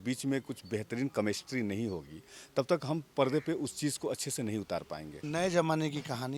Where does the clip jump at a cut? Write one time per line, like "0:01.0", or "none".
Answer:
0:05.2